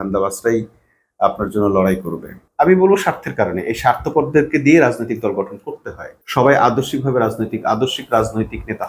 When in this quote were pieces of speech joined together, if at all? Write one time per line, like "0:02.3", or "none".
0:02.4